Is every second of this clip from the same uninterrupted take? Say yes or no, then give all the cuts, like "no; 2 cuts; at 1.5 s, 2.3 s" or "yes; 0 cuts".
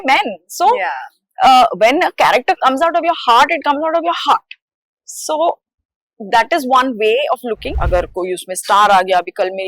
no; 1 cut; at 7.7 s